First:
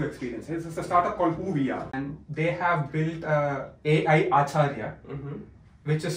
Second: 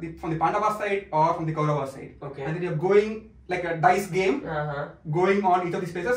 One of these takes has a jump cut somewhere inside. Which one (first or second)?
first